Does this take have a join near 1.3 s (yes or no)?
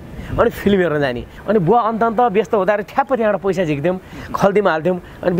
yes